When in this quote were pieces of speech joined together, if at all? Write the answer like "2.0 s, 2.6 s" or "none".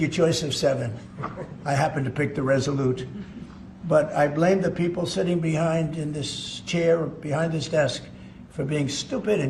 none